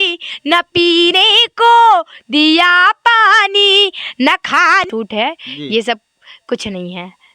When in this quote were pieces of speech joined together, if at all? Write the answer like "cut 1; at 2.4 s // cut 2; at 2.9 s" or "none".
cut 1; at 4.9 s